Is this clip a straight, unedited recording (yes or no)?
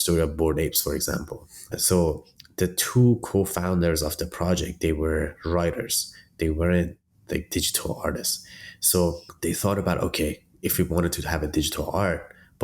no